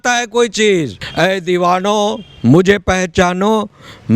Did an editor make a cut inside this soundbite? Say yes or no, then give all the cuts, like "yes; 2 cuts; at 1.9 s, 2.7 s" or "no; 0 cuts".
yes; 1 cut; at 1.0 s